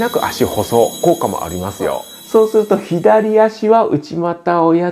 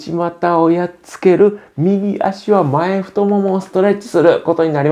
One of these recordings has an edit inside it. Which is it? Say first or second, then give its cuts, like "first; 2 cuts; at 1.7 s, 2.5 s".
first; 1 cut; at 2.0 s